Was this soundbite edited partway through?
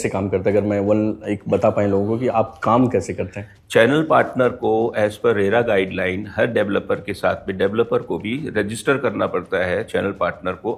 no; 0 cuts

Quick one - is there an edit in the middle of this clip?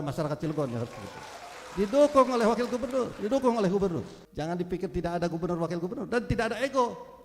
yes; 1 cut; at 4.2 s

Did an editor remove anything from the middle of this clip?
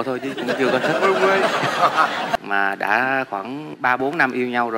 yes; 1 cut; at 2.3 s

